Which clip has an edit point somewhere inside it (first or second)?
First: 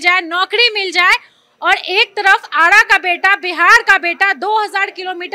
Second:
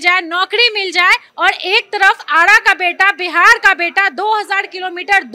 second